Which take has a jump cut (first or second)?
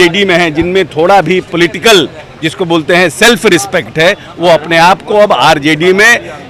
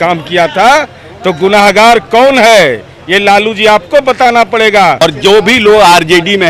second